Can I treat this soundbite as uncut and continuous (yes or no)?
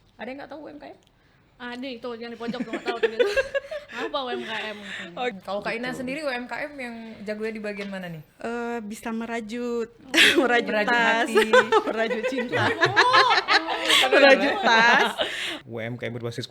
no